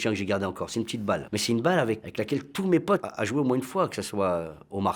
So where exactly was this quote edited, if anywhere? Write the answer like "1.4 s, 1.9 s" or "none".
1.3 s